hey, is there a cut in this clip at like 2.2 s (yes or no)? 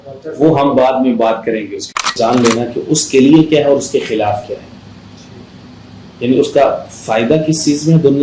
yes